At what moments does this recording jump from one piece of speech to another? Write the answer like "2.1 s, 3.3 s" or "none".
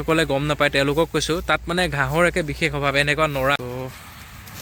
3.6 s